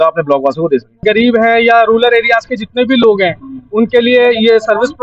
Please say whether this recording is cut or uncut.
cut